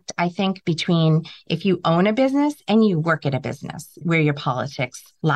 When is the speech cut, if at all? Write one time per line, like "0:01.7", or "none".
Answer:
none